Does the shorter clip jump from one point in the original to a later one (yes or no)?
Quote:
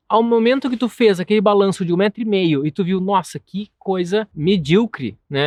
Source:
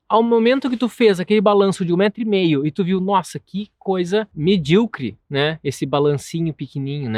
no